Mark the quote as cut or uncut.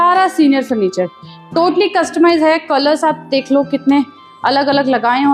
uncut